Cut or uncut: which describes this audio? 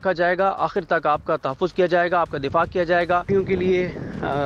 cut